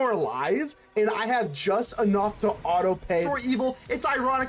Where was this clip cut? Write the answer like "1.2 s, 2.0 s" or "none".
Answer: 3.3 s